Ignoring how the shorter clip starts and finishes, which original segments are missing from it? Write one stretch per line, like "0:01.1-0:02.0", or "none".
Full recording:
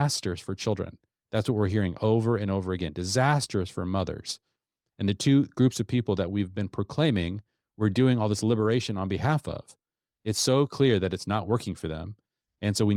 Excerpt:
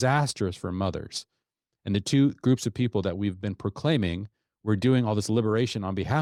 none